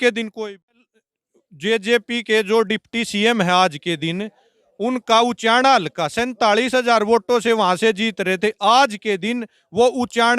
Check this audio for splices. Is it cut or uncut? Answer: cut